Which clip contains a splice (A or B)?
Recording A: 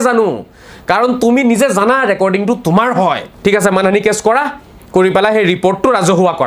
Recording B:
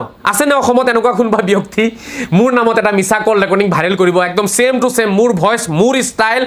A